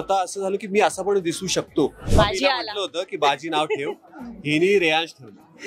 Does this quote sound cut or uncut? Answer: cut